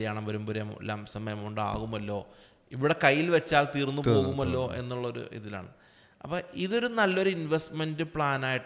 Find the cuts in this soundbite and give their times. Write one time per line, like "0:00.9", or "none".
none